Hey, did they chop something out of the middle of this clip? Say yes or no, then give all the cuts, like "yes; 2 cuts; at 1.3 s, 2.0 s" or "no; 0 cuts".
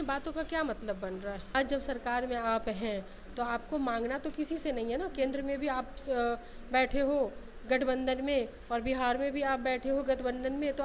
yes; 1 cut; at 1.4 s